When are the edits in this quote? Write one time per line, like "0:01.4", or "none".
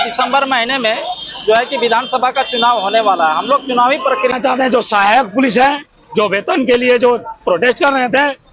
0:04.3